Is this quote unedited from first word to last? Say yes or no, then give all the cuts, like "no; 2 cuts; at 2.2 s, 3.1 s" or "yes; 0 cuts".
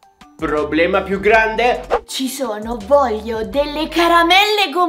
no; 1 cut; at 1.8 s